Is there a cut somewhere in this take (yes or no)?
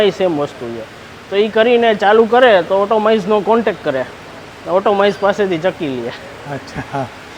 no